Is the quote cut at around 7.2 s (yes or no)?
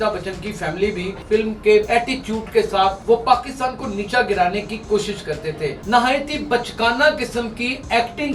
no